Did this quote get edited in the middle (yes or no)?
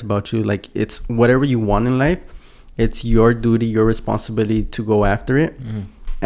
no